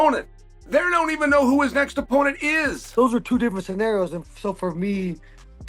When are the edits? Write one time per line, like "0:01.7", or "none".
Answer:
0:02.8